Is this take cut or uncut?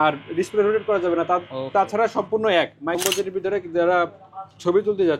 cut